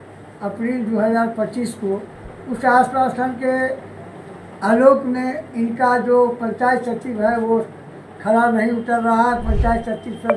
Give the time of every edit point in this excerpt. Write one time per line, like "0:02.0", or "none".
none